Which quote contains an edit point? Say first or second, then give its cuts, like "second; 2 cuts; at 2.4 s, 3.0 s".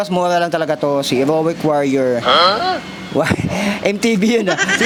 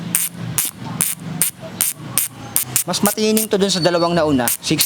second; 1 cut; at 2.6 s